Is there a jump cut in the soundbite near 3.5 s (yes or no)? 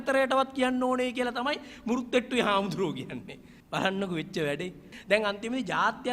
no